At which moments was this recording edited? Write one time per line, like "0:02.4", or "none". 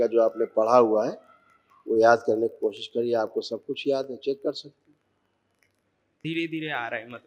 0:06.2